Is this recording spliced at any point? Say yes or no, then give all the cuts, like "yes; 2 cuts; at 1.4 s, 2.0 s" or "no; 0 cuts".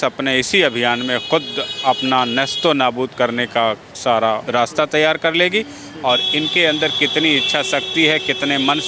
yes; 1 cut; at 4.4 s